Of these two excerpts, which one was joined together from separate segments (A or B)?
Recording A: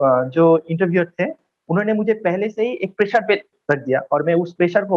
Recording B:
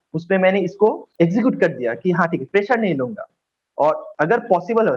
B